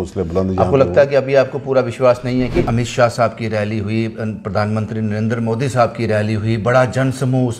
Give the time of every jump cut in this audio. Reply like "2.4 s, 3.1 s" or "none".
2.7 s

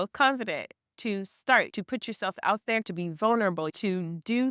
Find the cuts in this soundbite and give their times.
0.9 s, 1.7 s, 2.9 s, 3.7 s

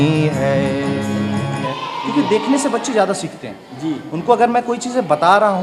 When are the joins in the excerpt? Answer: 1.7 s

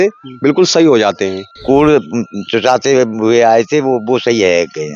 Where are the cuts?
1.6 s

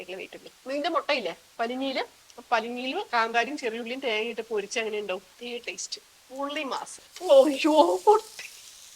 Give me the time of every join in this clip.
7.0 s

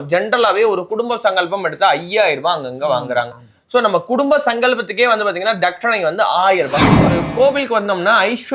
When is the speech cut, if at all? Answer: 7.0 s

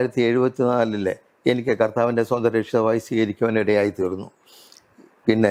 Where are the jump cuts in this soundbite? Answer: none

